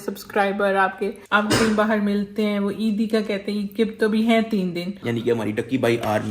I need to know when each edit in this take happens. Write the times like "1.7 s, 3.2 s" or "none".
1.3 s, 4.9 s